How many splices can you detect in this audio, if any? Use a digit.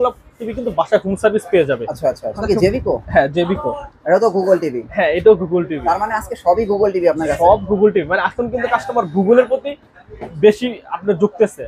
1